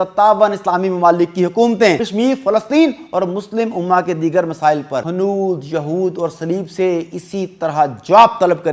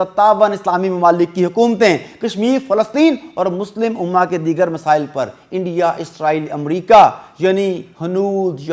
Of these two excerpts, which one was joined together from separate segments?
first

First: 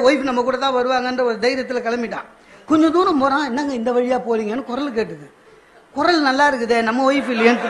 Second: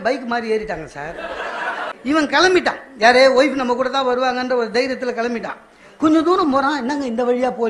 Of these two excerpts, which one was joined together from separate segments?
second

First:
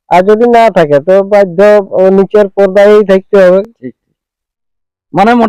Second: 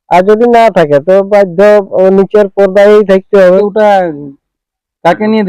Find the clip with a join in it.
second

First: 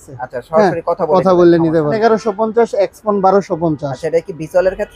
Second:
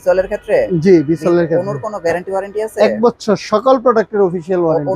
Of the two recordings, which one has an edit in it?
first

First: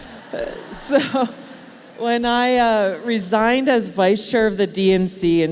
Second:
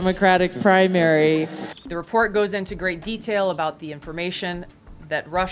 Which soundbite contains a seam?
second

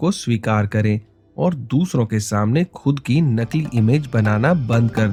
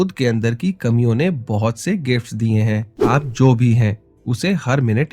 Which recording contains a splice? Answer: second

